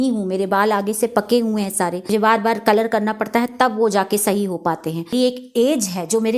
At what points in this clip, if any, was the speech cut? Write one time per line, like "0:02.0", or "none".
0:02.1
0:05.1